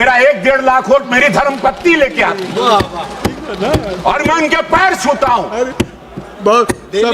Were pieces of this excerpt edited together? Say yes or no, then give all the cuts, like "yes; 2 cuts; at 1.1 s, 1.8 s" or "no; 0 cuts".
no; 0 cuts